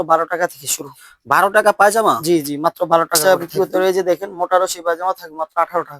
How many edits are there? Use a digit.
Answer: 1